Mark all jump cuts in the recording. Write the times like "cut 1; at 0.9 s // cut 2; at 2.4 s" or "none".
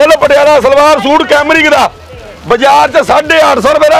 none